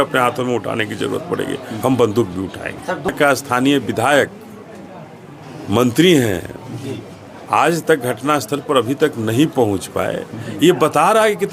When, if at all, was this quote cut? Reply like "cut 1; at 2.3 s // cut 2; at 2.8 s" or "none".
cut 1; at 3.1 s